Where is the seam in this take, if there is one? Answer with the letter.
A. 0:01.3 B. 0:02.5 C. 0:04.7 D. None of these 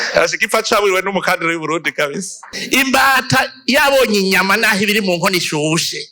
B